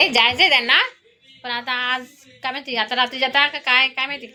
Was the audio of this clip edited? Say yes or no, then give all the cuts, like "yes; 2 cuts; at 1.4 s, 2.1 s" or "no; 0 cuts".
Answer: no; 0 cuts